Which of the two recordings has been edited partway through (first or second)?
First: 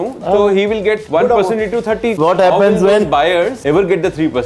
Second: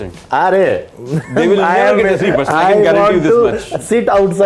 first